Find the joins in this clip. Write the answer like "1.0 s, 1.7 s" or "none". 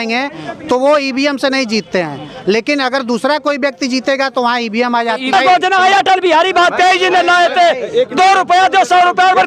5.3 s